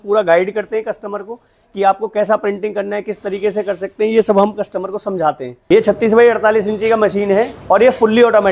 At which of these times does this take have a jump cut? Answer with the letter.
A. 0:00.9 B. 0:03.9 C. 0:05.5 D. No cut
C